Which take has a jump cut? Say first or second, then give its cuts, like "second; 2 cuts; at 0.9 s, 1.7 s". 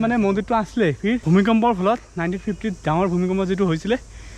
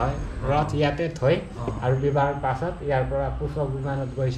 first; 1 cut; at 1.2 s